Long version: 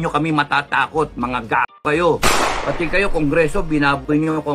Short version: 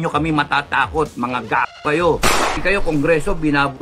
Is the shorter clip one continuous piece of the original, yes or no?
no